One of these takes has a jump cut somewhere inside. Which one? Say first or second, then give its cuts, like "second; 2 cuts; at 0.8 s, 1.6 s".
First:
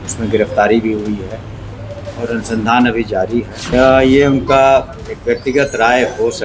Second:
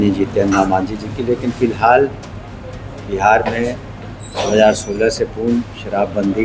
first; 1 cut; at 3.6 s